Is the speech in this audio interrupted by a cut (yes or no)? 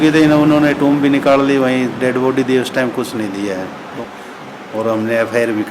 yes